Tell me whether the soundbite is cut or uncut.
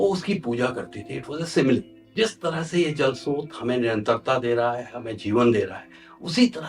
cut